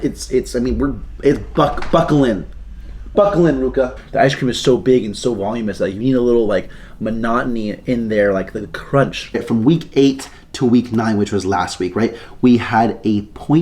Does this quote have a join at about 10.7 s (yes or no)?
no